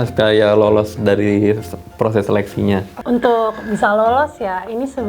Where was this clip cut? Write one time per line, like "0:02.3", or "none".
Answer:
0:02.9